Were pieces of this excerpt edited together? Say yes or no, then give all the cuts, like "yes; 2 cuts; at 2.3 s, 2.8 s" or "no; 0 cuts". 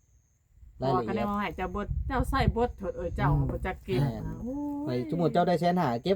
no; 0 cuts